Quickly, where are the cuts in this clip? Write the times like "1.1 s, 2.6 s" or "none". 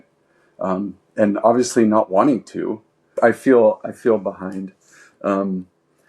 3.1 s